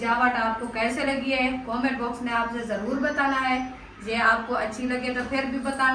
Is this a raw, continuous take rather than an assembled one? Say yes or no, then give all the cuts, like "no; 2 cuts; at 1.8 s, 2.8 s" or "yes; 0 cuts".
yes; 0 cuts